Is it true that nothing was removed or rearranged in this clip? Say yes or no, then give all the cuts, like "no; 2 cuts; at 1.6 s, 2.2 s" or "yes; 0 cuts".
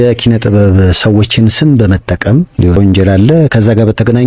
no; 1 cut; at 2.8 s